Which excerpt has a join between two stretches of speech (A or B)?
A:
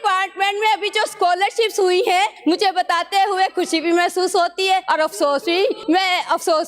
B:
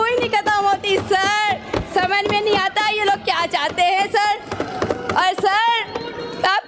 A